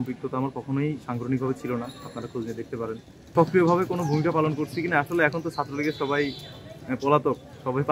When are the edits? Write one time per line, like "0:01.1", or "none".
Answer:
0:03.3